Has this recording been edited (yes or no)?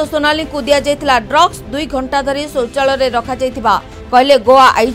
no